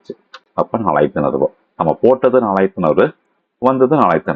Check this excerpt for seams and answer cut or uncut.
uncut